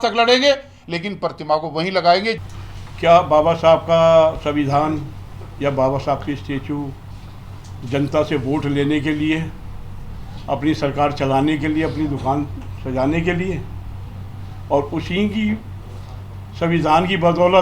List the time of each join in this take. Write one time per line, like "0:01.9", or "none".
none